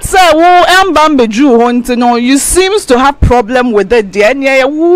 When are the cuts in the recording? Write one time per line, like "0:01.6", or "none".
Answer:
none